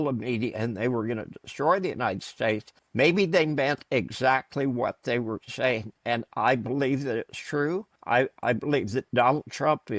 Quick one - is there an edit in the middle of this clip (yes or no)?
yes